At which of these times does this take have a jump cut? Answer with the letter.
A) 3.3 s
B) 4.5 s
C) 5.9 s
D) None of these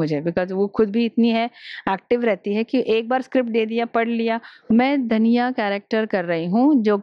B